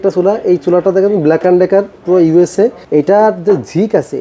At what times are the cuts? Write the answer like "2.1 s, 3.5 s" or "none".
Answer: 2.8 s

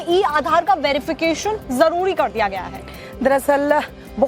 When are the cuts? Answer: 2.1 s

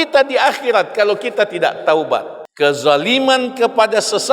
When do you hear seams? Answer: 2.4 s

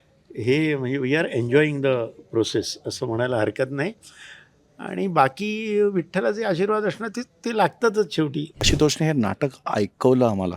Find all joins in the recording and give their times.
8.6 s

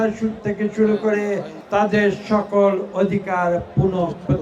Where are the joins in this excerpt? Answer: 1.5 s

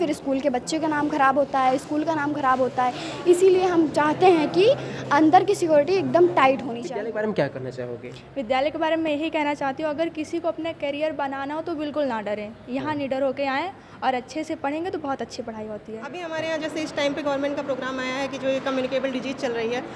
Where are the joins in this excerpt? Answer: 6.8 s, 16.2 s

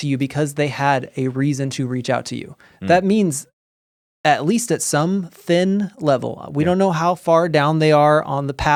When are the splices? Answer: none

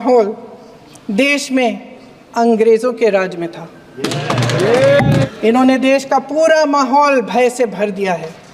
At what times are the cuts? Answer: 5.3 s

